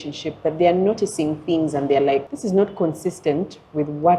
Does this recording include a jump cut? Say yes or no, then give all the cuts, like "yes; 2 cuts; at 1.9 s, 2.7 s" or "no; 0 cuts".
yes; 1 cut; at 2.3 s